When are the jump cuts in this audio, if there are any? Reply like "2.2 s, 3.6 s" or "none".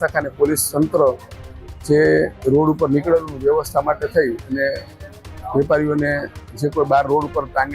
none